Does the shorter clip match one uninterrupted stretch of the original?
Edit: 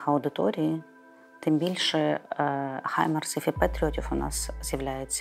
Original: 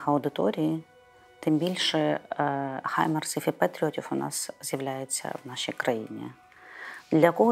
yes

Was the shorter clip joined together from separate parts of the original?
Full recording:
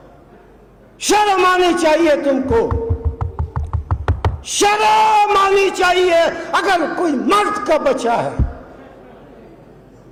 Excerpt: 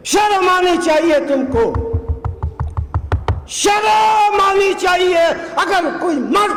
no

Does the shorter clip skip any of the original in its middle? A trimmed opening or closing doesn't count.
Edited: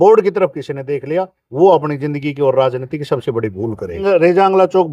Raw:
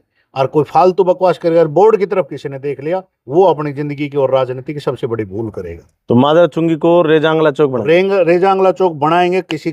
yes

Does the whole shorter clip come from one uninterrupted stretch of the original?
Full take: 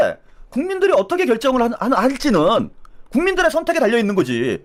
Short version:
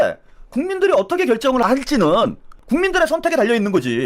no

